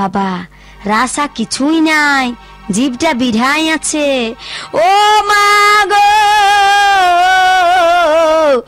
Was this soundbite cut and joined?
no; 0 cuts

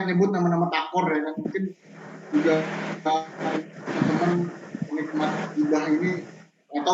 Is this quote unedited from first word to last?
yes; 0 cuts

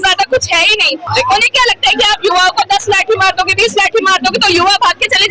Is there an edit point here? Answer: yes; 1 cut; at 1.0 s

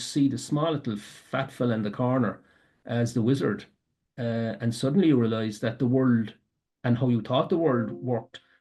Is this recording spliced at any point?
no; 0 cuts

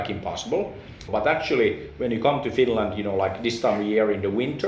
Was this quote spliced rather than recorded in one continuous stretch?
yes; 1 cut; at 1.1 s

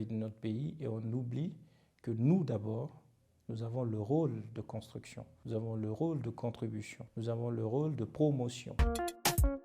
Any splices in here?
yes; 1 cut; at 8.7 s

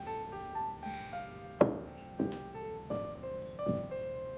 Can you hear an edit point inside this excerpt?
no; 0 cuts

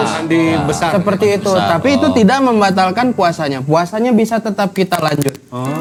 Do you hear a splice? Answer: no; 0 cuts

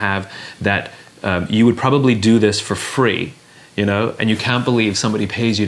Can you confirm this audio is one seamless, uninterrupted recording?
yes; 0 cuts

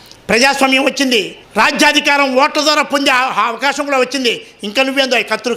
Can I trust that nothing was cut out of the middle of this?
no; 1 cut; at 1.4 s

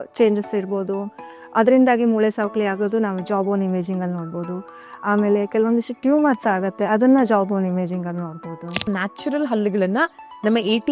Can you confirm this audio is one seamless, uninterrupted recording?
no; 1 cut; at 8.9 s

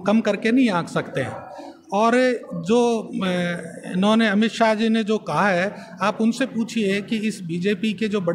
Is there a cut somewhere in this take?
no; 0 cuts

